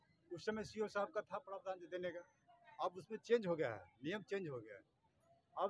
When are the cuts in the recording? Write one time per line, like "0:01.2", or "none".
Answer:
none